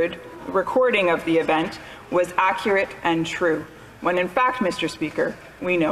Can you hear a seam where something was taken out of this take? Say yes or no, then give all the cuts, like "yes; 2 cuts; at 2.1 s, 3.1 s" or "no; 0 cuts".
no; 0 cuts